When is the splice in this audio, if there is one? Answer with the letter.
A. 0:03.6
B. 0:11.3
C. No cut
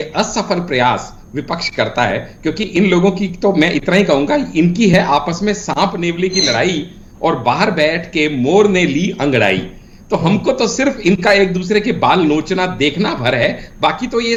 C